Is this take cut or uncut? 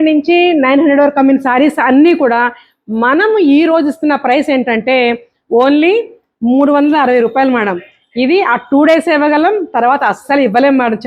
uncut